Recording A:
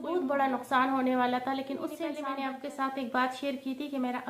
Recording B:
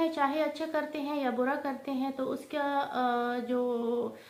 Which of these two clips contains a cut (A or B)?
A